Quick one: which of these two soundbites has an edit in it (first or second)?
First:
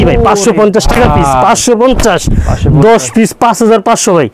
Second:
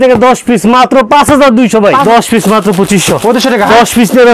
second